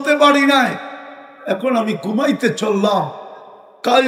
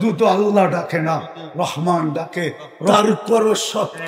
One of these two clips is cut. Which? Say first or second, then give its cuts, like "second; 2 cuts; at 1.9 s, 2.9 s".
second; 1 cut; at 2.9 s